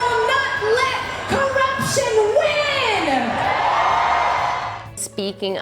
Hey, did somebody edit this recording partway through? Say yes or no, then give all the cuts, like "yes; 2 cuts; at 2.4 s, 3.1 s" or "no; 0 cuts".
yes; 1 cut; at 4.7 s